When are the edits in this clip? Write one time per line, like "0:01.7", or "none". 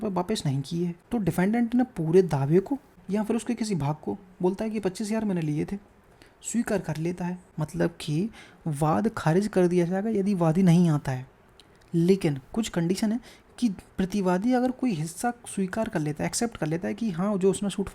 0:01.0
0:02.9
0:07.5

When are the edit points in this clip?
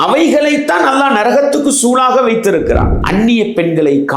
0:03.0

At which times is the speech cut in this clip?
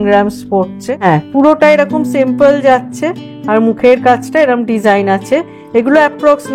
0:01.0

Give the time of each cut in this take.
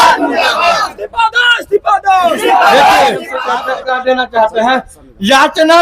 0:03.4

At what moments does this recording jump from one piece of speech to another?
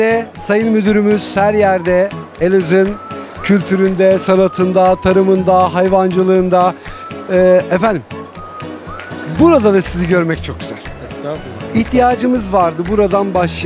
none

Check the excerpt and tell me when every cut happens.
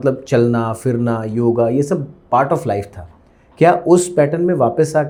none

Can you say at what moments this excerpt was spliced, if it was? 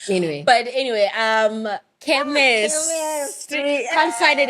0:01.9

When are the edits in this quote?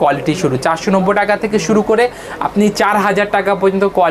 none

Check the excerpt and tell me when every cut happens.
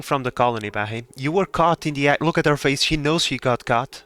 none

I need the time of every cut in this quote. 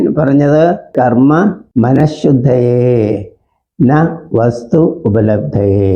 0:00.9
0:01.6

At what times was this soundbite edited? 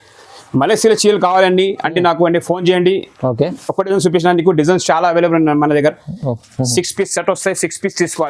none

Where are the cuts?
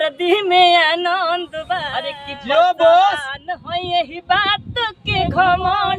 0:02.1

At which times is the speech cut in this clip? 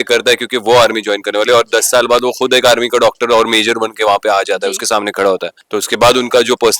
0:05.6

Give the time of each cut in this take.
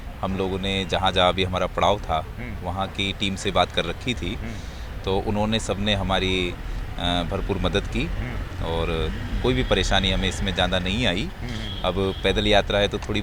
none

